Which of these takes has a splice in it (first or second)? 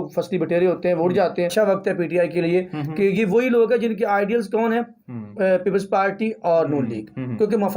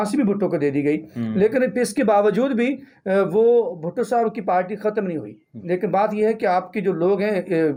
first